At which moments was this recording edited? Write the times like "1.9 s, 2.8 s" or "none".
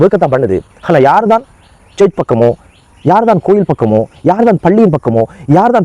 none